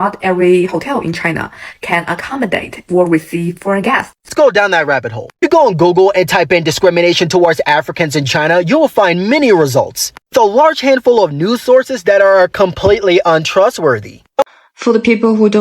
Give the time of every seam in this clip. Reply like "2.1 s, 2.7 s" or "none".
4.1 s, 14.4 s